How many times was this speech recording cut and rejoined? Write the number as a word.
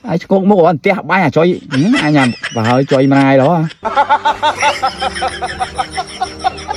zero